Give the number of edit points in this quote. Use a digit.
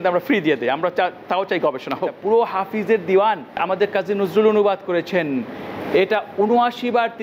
2